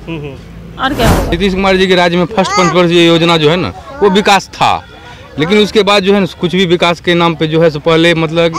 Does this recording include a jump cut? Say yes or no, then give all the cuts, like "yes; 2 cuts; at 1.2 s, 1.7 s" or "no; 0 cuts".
yes; 1 cut; at 1.3 s